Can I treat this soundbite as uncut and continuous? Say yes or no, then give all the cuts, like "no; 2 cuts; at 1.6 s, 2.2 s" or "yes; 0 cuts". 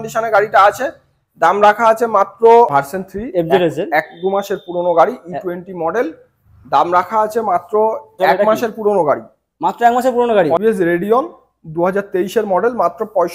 no; 3 cuts; at 2.7 s, 8.2 s, 10.6 s